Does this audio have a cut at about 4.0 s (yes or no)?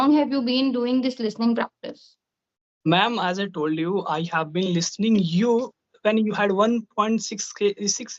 no